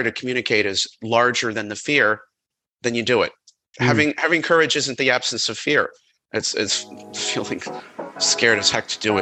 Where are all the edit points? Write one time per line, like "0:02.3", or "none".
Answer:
0:00.8
0:03.6